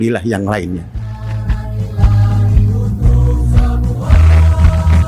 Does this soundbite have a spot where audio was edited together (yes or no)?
yes